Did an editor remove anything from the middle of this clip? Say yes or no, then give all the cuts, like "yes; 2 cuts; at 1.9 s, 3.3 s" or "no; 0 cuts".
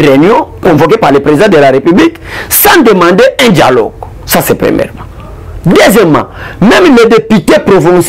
no; 0 cuts